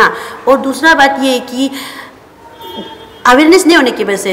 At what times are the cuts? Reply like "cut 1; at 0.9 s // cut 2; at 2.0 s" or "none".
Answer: none